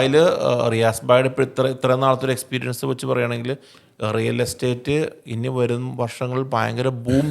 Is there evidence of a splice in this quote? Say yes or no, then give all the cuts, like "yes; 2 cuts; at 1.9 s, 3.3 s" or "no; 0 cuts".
no; 0 cuts